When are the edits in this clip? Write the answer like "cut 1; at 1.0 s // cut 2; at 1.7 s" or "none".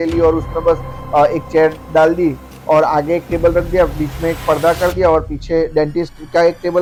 none